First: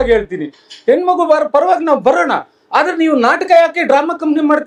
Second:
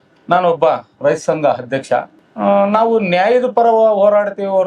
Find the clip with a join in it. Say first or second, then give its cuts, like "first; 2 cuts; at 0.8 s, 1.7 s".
second; 1 cut; at 2.2 s